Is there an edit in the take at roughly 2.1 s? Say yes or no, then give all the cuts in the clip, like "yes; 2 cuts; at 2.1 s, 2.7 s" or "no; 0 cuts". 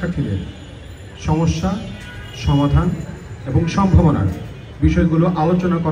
no; 0 cuts